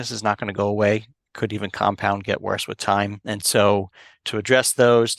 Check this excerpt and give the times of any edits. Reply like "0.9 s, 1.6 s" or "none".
3.2 s, 4.2 s